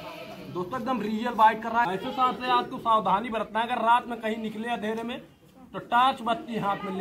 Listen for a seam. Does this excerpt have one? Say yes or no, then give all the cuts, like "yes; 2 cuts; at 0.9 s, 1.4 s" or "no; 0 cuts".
yes; 1 cut; at 1.9 s